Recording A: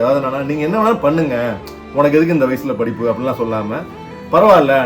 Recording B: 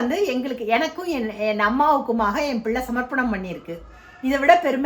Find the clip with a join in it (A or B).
A